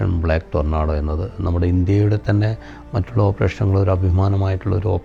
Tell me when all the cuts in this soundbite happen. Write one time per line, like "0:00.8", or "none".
none